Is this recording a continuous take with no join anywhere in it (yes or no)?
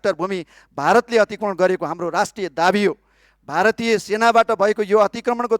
yes